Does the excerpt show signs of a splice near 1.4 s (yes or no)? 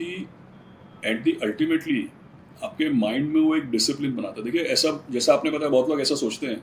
no